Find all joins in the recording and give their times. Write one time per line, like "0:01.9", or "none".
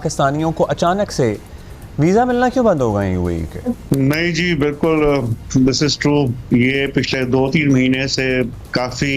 0:03.8